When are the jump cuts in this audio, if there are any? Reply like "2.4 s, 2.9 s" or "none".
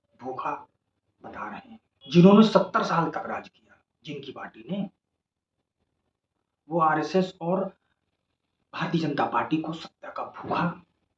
1.9 s